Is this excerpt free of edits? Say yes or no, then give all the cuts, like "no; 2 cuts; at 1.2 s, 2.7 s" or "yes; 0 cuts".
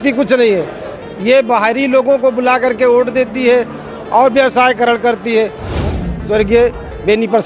no; 1 cut; at 5.8 s